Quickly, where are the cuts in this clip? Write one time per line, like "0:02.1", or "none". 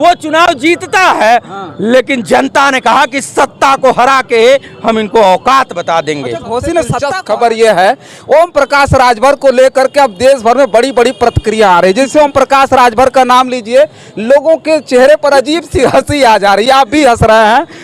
0:07.1